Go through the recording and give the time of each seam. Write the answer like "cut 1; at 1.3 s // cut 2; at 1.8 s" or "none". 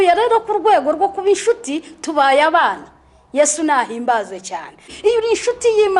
cut 1; at 4.9 s